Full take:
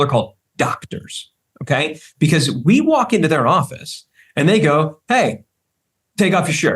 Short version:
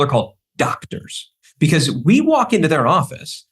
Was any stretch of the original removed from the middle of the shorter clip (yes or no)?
yes